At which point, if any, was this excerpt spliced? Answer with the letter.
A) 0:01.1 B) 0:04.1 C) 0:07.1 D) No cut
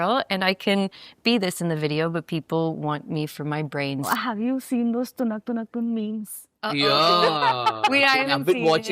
B